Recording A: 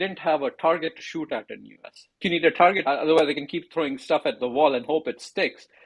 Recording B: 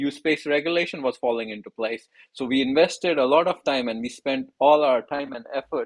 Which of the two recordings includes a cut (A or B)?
A